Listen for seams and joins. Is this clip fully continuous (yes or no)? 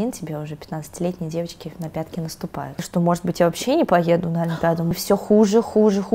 no